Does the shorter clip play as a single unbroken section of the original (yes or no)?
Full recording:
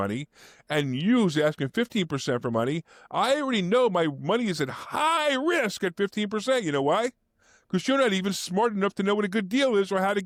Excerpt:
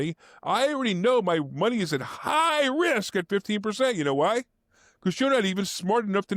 yes